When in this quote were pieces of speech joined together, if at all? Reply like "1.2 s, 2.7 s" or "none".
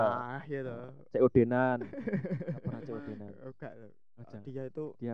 2.7 s